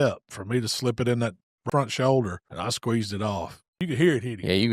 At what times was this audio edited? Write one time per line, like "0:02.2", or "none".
0:01.6
0:02.4
0:03.7